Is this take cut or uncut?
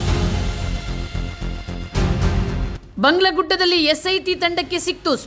uncut